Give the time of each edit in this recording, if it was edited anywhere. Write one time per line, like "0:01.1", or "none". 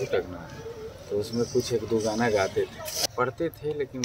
0:02.9